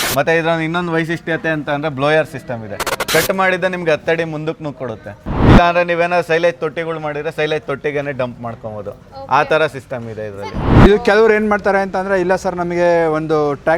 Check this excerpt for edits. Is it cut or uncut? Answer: cut